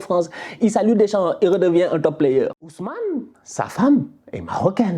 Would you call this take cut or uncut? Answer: cut